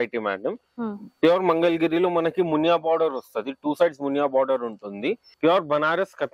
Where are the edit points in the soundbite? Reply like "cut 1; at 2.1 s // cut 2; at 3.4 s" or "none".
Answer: cut 1; at 5.3 s